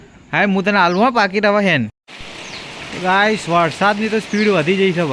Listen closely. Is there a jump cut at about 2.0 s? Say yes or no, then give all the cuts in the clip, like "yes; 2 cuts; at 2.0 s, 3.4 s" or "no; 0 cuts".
yes; 1 cut; at 2.0 s